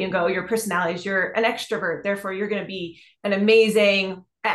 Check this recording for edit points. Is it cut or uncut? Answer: uncut